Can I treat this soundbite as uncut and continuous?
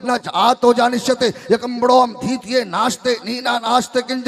yes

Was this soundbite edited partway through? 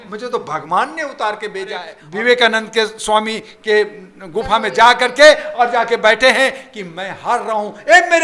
yes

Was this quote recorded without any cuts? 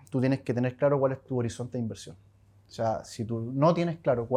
yes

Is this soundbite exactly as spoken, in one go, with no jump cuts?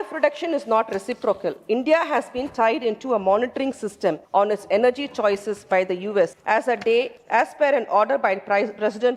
no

